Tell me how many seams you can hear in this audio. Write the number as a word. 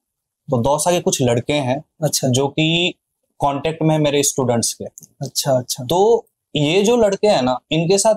zero